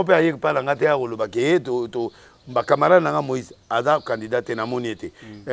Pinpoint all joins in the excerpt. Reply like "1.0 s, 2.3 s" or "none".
none